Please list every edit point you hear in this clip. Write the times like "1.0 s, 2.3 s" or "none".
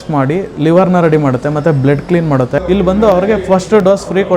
2.6 s

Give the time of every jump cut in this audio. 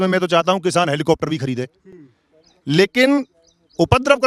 none

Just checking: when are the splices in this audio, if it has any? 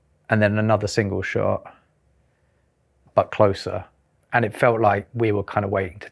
3.9 s

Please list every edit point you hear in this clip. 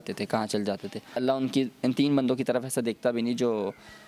1.2 s

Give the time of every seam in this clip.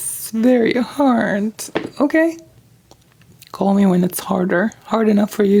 none

